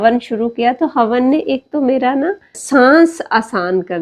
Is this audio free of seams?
no; 1 cut; at 2.6 s

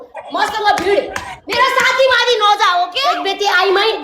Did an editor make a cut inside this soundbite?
yes; 1 cut; at 3.0 s

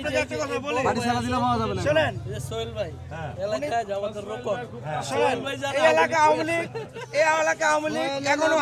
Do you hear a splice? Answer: no; 0 cuts

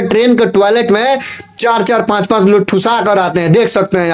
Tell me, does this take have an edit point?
no; 0 cuts

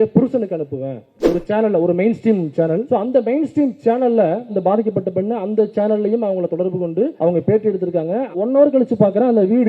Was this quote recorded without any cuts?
no; 5 cuts; at 1.1 s, 2.8 s, 4.5 s, 7.1 s, 8.3 s

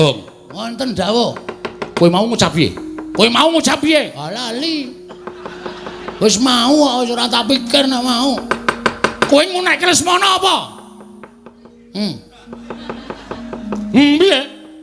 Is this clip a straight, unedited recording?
yes; 0 cuts

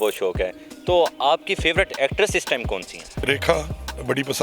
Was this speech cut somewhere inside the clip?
yes; 1 cut; at 3.2 s

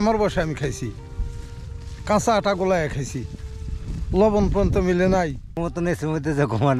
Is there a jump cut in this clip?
yes; 1 cut; at 5.4 s

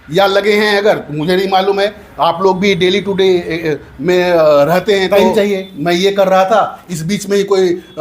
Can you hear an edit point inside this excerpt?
yes; 1 cut; at 5.1 s

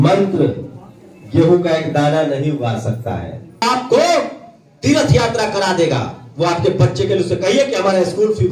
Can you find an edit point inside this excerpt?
yes; 1 cut; at 3.6 s

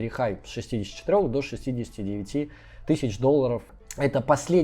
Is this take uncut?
no; 1 cut; at 3.7 s

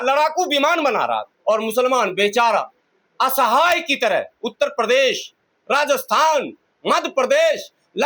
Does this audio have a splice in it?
yes; 1 cut; at 1.3 s

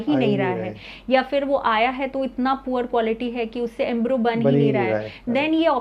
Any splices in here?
no; 0 cuts

